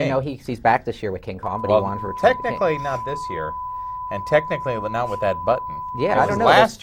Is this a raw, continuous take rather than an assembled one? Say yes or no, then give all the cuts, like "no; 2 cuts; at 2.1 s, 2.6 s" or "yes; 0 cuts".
yes; 0 cuts